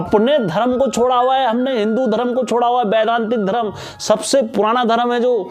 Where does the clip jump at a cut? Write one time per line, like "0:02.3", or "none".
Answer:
none